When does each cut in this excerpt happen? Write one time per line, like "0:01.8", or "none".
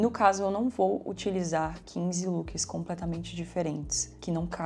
none

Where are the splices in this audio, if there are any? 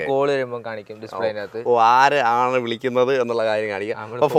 none

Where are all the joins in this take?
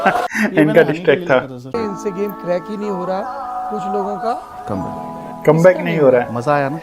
0:01.6

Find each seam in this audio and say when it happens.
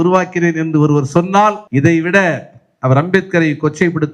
0:01.6

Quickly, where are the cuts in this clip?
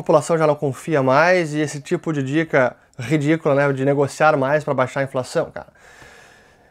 none

